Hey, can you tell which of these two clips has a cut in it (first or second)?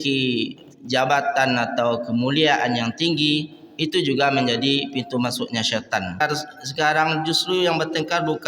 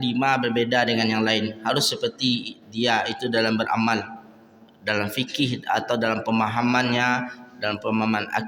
first